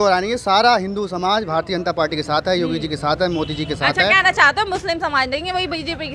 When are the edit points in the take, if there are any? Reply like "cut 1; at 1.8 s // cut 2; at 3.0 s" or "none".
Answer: none